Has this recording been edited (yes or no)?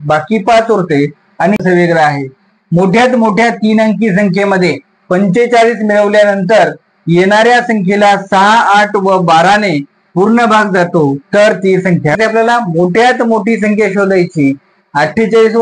yes